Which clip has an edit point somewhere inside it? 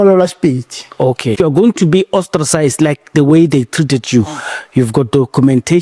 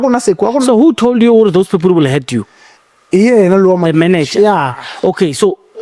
first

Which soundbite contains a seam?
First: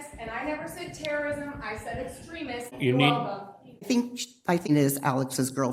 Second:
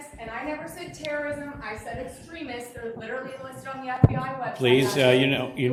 first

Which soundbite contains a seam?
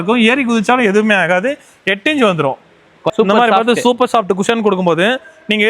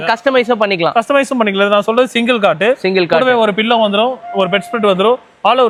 first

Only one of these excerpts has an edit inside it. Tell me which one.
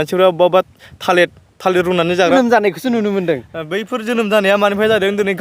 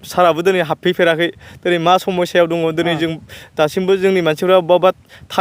first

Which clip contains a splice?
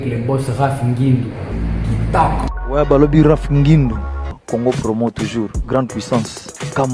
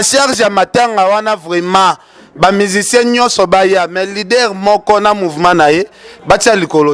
first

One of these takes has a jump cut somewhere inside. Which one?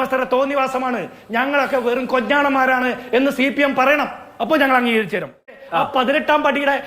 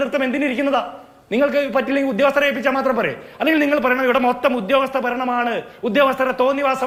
first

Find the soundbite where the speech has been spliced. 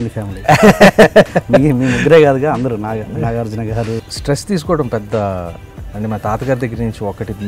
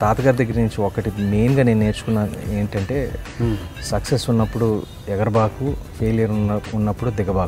first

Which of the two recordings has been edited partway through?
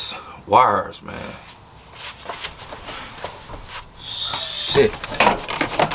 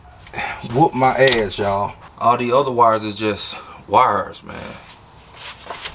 second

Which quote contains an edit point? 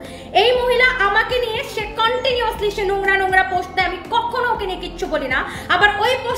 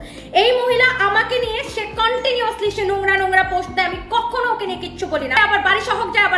second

